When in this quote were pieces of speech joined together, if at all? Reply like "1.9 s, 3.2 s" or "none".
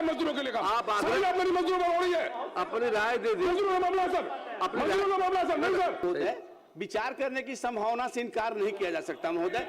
6.0 s